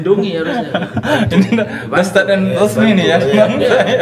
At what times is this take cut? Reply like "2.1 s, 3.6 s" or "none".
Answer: none